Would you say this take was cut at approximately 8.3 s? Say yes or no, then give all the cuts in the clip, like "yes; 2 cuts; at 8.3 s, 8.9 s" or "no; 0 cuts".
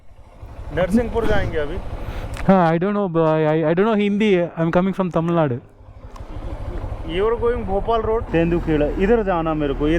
yes; 1 cut; at 8.3 s